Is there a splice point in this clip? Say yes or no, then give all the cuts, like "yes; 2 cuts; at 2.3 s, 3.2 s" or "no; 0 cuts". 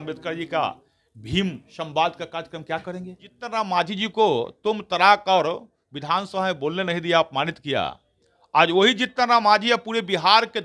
yes; 1 cut; at 3.4 s